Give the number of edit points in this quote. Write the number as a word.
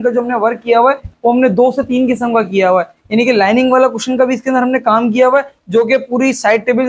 zero